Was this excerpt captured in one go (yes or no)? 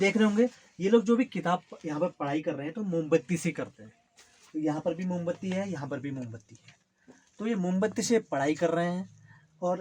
yes